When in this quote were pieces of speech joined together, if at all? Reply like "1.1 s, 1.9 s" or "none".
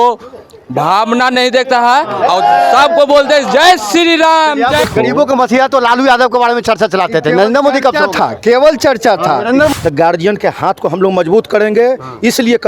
4.9 s, 9.7 s